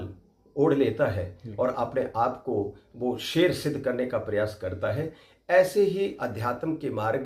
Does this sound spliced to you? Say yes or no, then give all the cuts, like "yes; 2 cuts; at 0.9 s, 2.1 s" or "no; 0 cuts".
no; 0 cuts